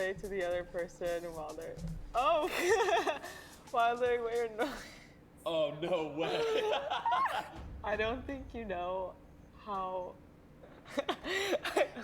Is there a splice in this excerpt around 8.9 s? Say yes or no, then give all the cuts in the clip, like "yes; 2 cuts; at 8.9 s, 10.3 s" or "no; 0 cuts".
no; 3 cuts; at 2.5 s, 7.6 s, 10.8 s